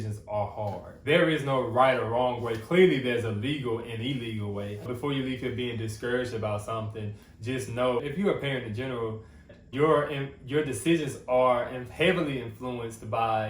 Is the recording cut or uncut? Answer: cut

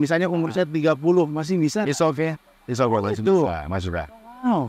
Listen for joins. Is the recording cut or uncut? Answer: uncut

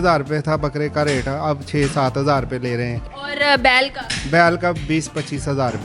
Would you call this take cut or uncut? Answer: uncut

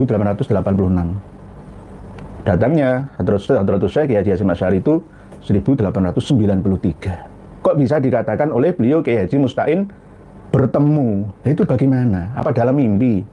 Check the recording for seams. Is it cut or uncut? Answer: uncut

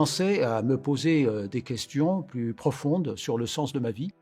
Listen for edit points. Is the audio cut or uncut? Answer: uncut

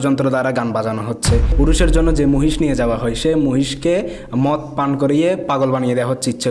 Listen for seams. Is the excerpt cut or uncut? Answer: cut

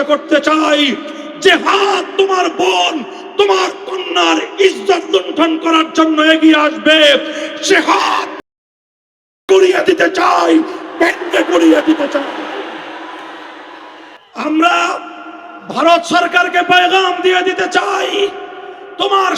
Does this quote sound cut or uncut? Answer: cut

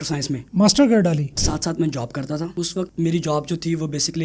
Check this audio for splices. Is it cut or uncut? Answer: cut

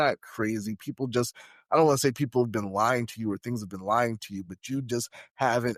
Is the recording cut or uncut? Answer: uncut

